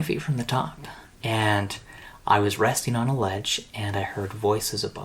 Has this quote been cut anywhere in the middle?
yes; 1 cut; at 1.1 s

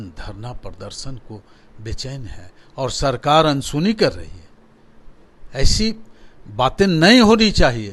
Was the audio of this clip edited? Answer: no; 0 cuts

